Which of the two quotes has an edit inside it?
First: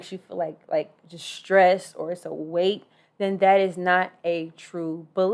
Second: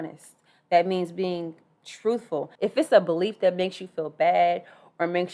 second; 1 cut; at 2.4 s

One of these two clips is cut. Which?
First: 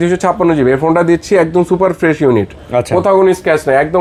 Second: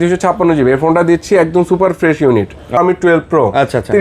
second; 1 cut; at 2.8 s

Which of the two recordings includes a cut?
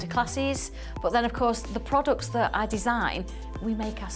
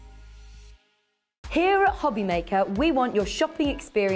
second; 1 cut; at 1.4 s

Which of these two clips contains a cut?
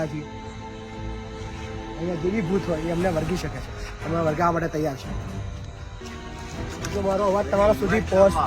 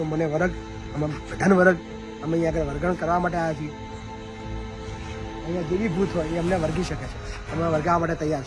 first; 1 cut; at 6.0 s

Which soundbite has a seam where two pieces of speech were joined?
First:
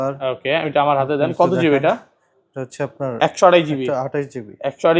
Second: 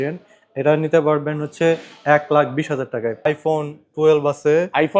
second; 1 cut; at 3.3 s

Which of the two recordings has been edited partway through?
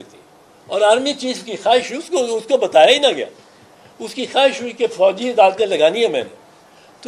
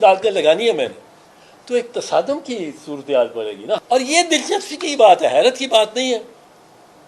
second; 1 cut; at 3.8 s

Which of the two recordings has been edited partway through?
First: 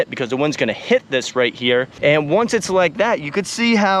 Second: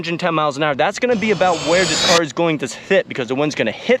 first; 1 cut; at 1.9 s

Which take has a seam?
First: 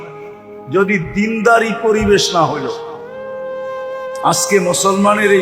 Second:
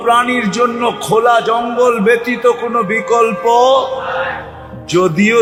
first; 2 cuts; at 2.7 s, 4.2 s

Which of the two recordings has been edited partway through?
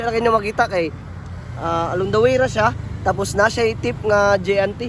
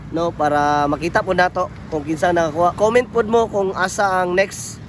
second; 1 cut; at 2.8 s

